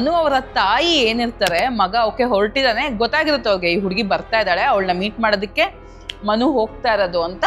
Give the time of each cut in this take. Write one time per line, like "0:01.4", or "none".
none